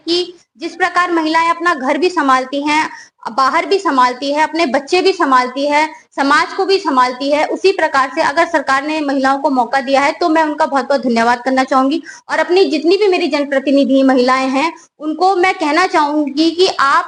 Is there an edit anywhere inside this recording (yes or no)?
no